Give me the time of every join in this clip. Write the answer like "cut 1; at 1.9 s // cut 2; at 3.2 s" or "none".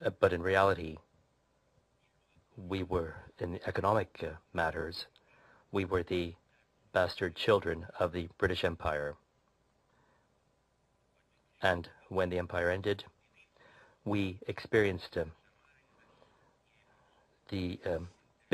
cut 1; at 8.5 s